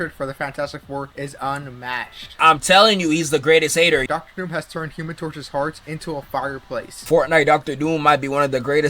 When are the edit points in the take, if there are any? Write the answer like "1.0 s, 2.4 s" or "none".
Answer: 4.0 s, 7.0 s